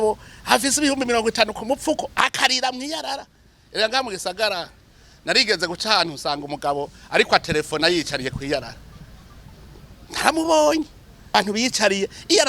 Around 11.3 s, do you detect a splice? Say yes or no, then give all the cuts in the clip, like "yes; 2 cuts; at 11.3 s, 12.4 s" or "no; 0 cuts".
yes; 1 cut; at 11.3 s